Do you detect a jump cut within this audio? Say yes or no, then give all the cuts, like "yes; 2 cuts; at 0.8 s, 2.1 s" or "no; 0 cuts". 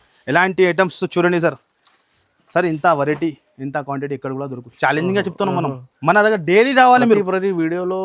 no; 0 cuts